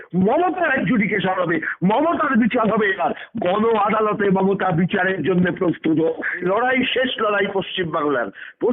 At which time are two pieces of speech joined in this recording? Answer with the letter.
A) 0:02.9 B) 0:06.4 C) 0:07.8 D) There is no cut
B